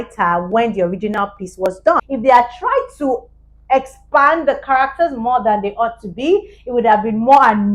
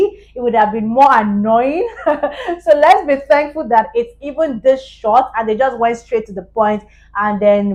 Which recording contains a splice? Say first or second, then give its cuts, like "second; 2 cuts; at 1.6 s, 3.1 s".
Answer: first; 1 cut; at 2.0 s